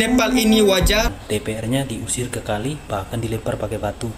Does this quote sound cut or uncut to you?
cut